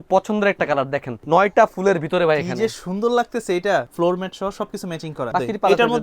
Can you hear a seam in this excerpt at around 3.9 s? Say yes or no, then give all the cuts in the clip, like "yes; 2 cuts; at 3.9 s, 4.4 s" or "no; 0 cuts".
yes; 3 cuts; at 1.1 s, 3.9 s, 5.3 s